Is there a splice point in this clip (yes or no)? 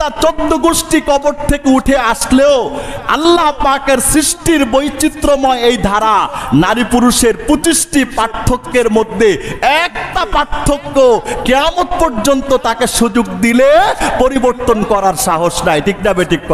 no